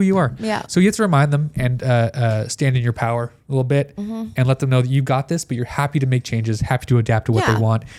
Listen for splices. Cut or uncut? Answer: uncut